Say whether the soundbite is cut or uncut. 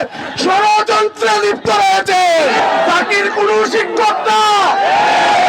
cut